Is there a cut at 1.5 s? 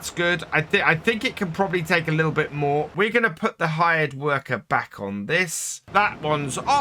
no; 2 cuts; at 2.9 s, 5.8 s

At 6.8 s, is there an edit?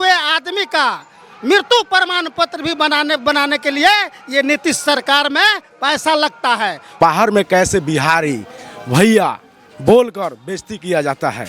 yes; 1 cut; at 6.8 s

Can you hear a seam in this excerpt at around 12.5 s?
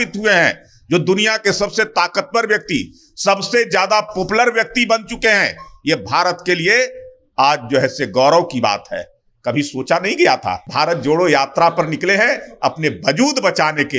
no; 1 cut; at 10.6 s

